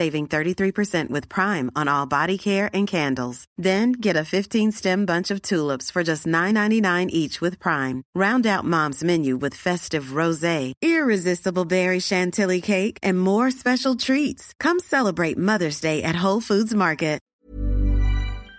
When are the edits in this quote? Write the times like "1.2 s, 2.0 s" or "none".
17.4 s